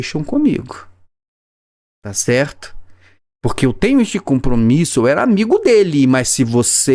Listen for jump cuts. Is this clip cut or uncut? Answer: uncut